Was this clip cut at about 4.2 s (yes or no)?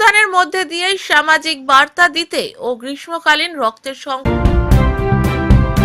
yes